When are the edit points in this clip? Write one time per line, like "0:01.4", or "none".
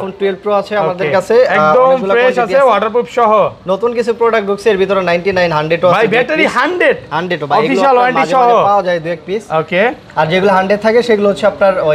none